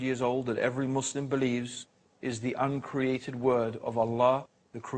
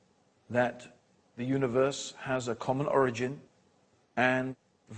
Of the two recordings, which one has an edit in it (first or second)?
first